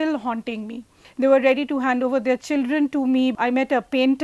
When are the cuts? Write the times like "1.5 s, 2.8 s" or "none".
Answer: 1.0 s, 3.4 s